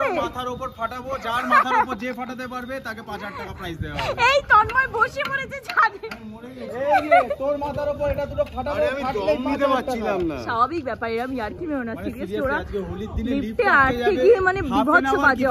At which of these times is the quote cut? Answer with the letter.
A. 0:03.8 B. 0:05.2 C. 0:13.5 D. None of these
D